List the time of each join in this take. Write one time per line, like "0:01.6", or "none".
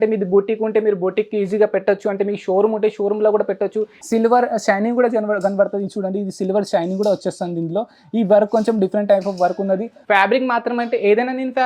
0:03.9
0:09.9